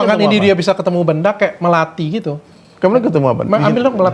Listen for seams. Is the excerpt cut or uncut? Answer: uncut